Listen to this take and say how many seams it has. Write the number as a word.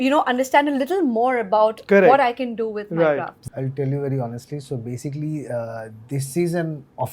one